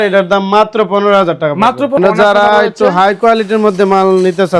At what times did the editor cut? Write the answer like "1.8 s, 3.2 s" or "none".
2.0 s